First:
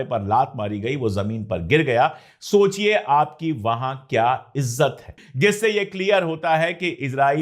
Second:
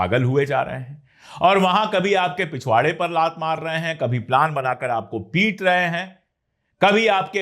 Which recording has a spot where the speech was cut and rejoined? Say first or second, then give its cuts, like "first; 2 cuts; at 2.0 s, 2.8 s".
first; 1 cut; at 5.2 s